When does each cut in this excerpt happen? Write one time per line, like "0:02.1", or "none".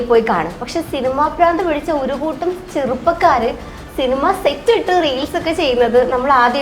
none